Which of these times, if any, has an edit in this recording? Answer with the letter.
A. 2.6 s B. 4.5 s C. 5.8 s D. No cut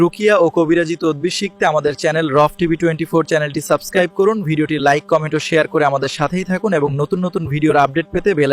D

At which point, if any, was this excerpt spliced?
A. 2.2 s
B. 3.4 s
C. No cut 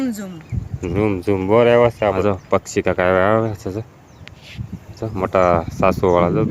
A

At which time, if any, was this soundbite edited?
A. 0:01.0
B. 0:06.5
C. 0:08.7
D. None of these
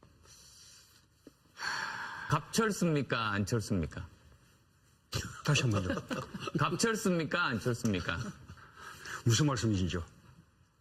D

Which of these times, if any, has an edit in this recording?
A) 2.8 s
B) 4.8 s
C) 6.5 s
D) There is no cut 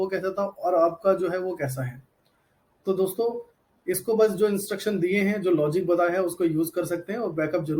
D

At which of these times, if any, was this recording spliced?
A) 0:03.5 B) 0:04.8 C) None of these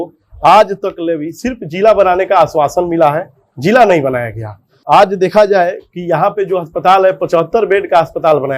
B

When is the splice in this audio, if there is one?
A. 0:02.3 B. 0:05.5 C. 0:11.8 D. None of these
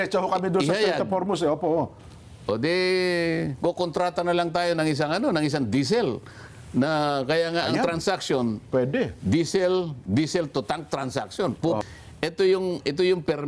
C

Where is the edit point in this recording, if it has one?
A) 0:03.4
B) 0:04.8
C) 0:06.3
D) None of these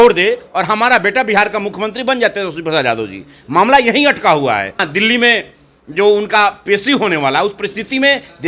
B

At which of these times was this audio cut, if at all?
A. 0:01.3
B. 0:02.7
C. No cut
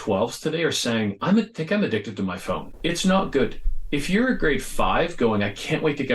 B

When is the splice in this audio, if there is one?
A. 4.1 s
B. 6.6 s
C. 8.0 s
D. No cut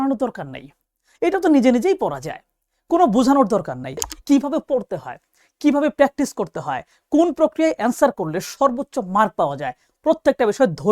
A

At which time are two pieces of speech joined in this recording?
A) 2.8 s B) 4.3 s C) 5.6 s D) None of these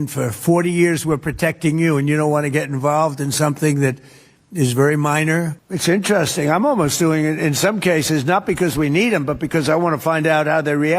C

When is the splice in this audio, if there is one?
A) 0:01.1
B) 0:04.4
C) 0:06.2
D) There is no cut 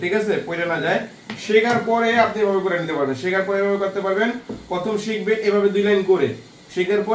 D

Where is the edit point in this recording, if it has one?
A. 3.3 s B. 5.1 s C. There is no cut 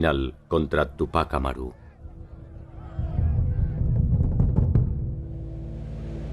B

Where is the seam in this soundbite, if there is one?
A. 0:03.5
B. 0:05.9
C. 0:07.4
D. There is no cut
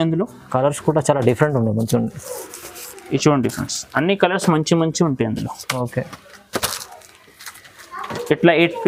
D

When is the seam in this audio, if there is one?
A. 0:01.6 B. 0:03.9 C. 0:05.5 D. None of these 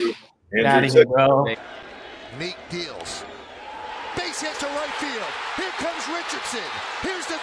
A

